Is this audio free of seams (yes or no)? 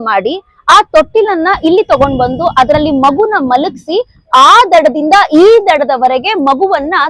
yes